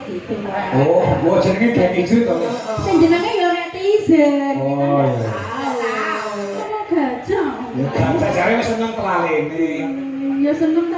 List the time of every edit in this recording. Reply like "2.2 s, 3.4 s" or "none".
6.7 s